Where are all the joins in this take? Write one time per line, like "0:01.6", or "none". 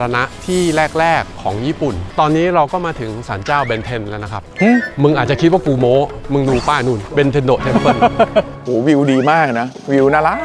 0:02.0
0:08.6